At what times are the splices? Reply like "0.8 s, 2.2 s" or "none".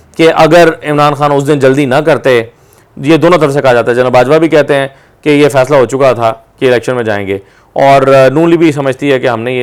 none

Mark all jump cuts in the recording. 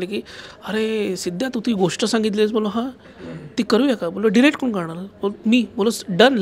none

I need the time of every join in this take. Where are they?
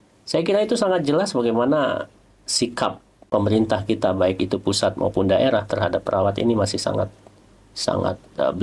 3.1 s

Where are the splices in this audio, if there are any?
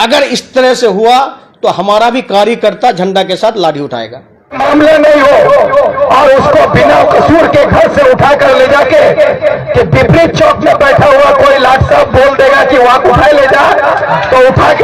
4.6 s

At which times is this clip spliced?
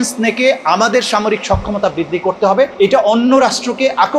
2.7 s

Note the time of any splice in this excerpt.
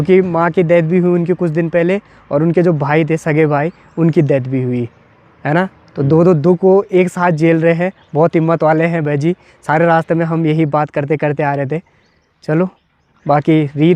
none

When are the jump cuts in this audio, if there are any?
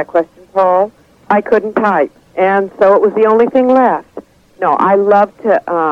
none

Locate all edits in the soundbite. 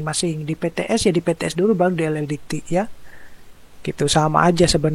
none

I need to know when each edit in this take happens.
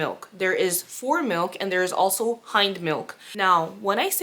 3.2 s

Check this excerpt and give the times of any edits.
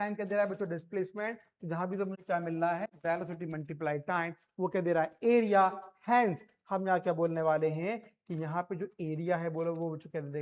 none

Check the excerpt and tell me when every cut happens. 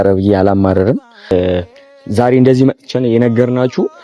1.3 s

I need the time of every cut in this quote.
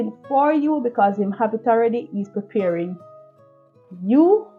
none

